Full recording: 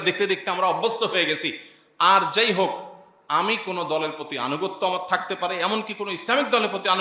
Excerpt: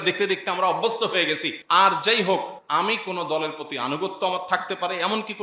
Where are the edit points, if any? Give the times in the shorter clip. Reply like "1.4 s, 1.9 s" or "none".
1.5 s, 2.6 s